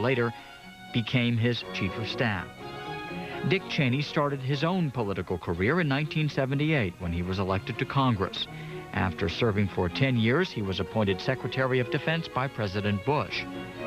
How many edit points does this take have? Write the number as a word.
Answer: one